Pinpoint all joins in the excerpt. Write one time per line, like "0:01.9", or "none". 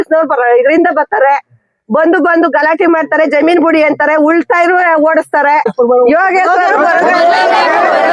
0:05.9